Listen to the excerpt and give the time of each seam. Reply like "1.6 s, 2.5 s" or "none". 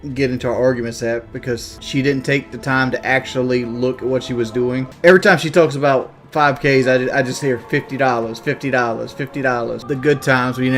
1.7 s, 4.9 s, 9.8 s